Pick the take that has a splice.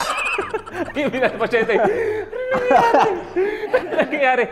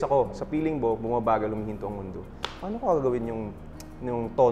first; 1 cut; at 0.9 s

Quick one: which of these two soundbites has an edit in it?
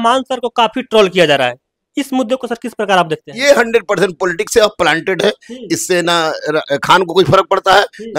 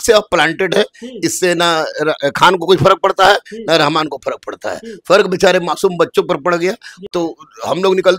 second; 1 cut; at 7.1 s

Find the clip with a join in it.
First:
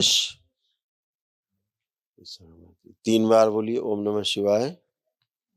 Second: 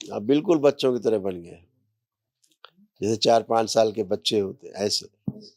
first; 1 cut; at 2.2 s

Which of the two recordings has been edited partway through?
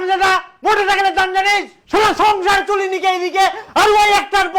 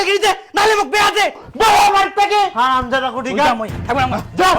second; 1 cut; at 1.4 s

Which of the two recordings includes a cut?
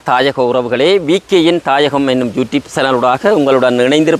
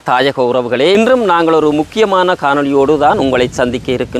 second; 1 cut; at 1.0 s

